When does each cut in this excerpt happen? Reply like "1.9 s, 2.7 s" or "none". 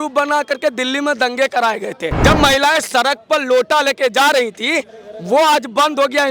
2.1 s